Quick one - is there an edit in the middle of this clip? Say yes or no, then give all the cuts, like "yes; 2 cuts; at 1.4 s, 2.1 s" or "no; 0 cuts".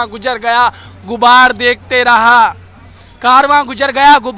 no; 0 cuts